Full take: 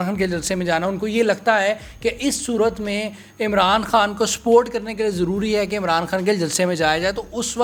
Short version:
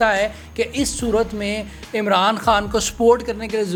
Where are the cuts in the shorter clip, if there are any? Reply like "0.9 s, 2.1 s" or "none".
none